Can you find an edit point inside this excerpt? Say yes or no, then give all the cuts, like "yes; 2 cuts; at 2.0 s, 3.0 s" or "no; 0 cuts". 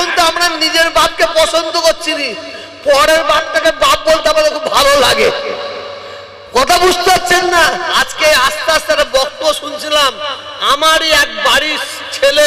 yes; 1 cut; at 7.9 s